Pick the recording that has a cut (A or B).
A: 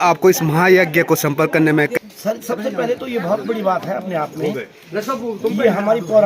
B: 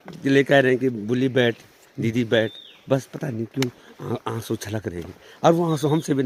A